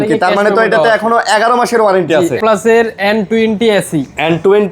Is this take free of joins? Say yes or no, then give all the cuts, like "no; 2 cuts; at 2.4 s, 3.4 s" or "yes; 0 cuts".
no; 1 cut; at 2.4 s